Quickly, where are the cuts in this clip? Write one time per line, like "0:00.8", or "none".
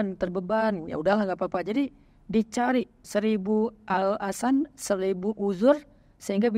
0:03.0